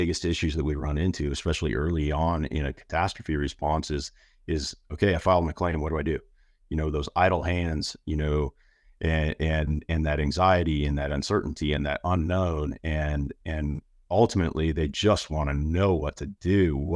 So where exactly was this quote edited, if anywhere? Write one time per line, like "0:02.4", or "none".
none